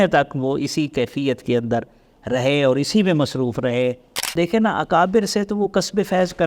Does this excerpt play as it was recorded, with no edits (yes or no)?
no